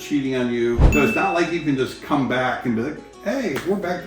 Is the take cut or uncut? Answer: cut